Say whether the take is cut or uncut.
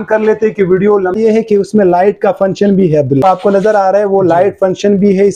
cut